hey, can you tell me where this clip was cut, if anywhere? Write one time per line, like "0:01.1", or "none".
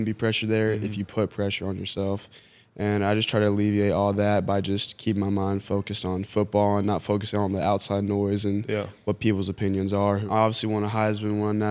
0:10.2